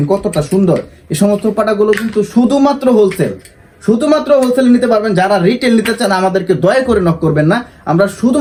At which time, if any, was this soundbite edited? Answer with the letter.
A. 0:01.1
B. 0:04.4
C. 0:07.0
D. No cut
D